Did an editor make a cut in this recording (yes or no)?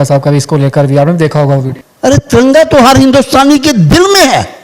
yes